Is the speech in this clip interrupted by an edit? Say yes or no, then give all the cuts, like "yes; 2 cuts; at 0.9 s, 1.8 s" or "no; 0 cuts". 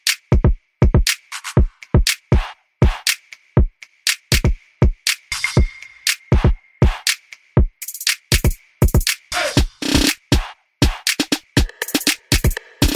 no; 0 cuts